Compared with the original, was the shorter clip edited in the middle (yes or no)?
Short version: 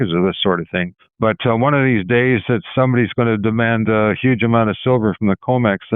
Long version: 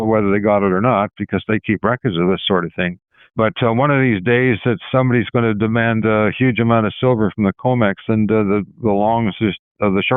yes